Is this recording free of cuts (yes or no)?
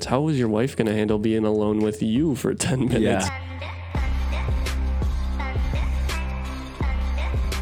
no